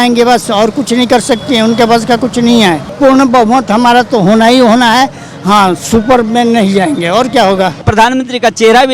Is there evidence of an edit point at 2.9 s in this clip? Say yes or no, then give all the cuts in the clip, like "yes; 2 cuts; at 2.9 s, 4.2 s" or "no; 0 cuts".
yes; 2 cuts; at 2.9 s, 7.9 s